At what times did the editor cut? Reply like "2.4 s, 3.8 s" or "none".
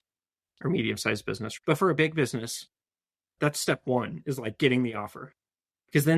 1.5 s